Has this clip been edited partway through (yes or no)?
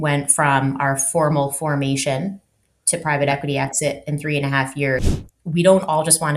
yes